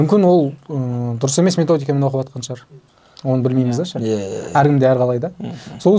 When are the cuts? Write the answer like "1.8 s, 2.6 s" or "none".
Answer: none

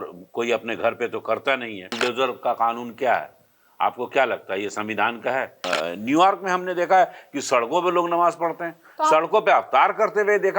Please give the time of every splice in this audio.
1.9 s, 5.6 s

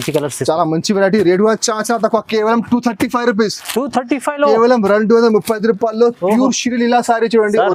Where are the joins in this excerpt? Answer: none

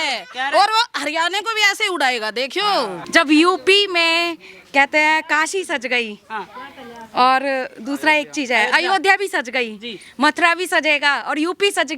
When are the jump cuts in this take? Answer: 3.2 s

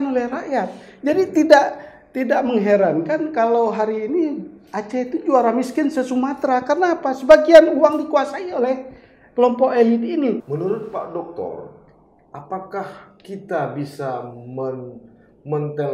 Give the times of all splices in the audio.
10.4 s

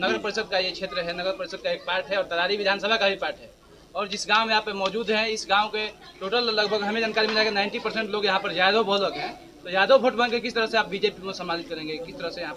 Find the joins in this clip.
none

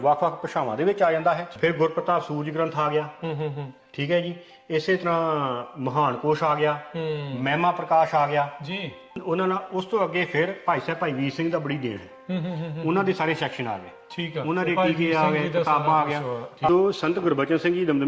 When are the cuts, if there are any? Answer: 1.5 s, 9.2 s, 16.7 s

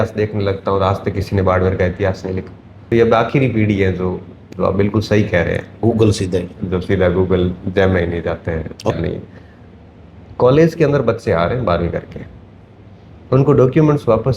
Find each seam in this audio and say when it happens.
2.9 s, 8.9 s

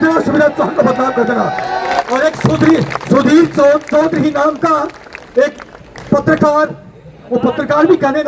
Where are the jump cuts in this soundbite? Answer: 2.0 s

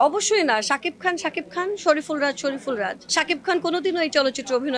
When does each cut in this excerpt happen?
3.0 s

